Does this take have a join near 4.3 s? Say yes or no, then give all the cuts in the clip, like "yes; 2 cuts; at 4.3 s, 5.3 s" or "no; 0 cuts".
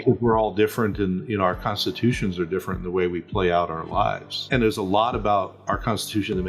yes; 1 cut; at 4.3 s